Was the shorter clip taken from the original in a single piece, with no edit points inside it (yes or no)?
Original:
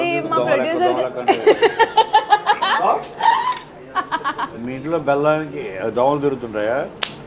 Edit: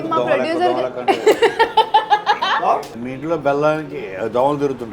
no